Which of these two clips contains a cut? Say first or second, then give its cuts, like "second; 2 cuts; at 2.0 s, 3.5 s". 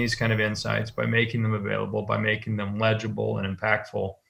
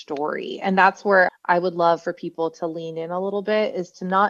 second; 1 cut; at 1.3 s